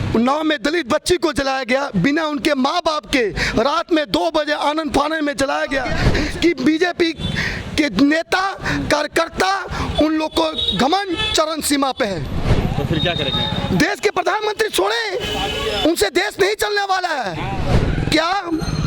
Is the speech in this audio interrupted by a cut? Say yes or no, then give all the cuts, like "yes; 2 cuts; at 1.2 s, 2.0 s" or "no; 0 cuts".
yes; 3 cuts; at 6.0 s, 12.5 s, 17.7 s